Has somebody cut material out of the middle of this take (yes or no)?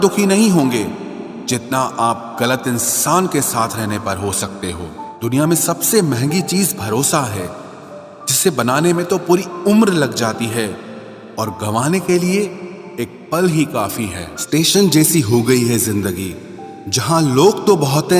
yes